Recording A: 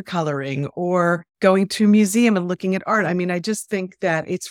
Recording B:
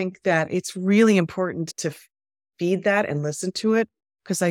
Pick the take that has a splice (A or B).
A